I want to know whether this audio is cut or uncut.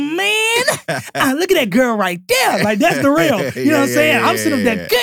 uncut